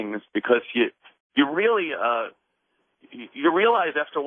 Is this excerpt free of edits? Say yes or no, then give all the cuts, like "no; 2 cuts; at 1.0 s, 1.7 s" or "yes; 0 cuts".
yes; 0 cuts